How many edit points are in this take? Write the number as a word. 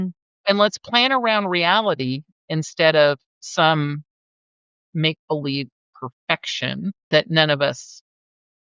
one